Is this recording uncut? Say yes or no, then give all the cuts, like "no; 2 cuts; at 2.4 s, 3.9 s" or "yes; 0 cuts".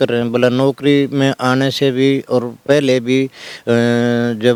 yes; 0 cuts